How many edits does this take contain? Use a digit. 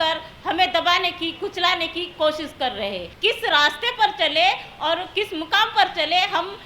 1